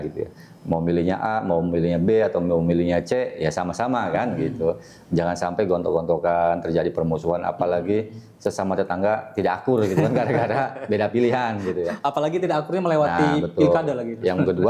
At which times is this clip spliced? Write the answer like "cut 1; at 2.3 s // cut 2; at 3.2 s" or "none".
none